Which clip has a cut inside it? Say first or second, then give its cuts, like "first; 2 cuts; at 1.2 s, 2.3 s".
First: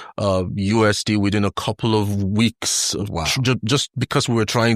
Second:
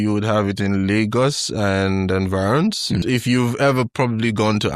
second; 1 cut; at 3.0 s